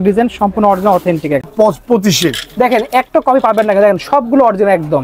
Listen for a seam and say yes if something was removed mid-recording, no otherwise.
yes